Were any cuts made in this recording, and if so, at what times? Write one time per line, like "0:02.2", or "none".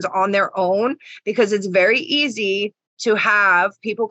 none